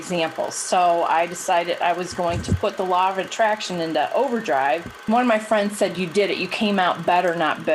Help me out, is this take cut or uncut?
cut